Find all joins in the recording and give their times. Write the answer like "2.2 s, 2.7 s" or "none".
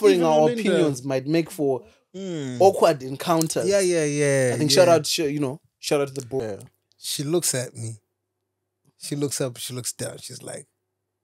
6.4 s